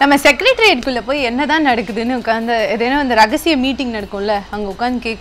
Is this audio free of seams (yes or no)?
yes